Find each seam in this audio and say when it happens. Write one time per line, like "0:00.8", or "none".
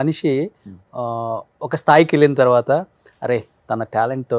none